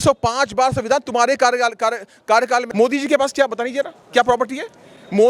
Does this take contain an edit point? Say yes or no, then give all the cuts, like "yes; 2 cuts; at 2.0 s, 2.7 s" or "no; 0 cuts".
yes; 1 cut; at 2.7 s